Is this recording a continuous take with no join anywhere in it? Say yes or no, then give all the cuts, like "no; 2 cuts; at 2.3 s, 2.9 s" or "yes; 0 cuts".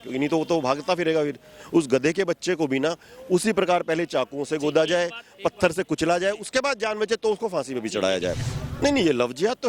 no; 1 cut; at 8.5 s